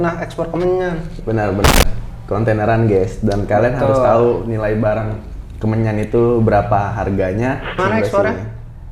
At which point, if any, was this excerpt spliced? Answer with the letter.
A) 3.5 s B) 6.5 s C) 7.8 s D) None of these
C